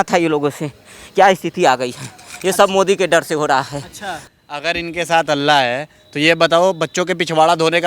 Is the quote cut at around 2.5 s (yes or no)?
no